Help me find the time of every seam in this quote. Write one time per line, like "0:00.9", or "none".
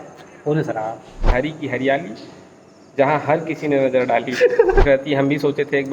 0:01.3
0:04.8